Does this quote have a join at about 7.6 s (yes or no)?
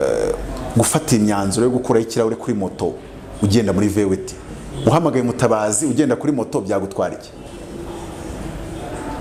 no